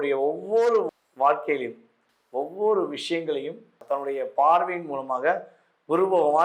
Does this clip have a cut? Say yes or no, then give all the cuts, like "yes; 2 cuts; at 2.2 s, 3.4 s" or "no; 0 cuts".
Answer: yes; 1 cut; at 3.8 s